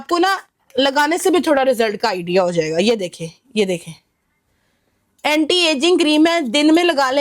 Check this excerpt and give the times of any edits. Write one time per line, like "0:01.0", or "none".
none

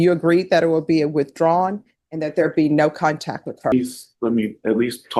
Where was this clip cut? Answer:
0:03.7

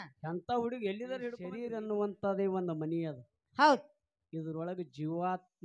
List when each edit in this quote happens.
0:01.7

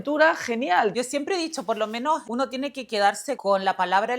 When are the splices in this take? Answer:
0:00.9
0:02.2
0:03.4

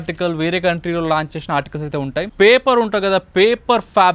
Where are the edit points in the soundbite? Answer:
0:02.3

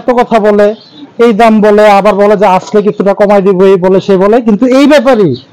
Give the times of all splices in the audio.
none

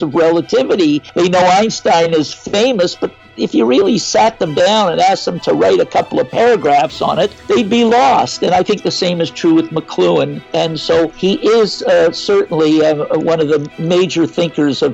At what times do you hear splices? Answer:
0:01.1
0:07.4
0:10.8
0:13.7

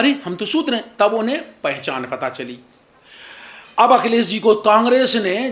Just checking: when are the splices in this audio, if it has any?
none

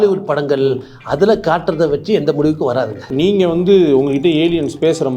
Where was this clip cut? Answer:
0:03.0

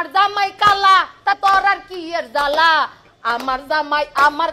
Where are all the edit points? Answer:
0:01.4

